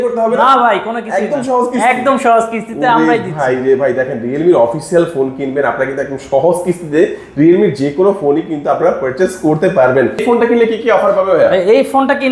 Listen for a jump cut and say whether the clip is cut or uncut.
cut